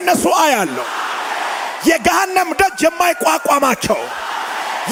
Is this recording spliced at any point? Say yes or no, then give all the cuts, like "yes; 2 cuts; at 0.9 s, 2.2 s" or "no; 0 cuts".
no; 0 cuts